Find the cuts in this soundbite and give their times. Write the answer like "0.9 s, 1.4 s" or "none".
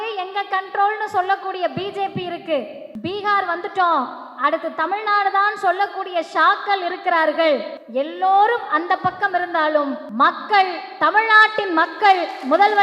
2.8 s, 7.8 s, 10.0 s